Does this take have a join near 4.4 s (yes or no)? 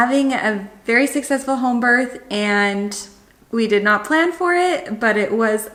no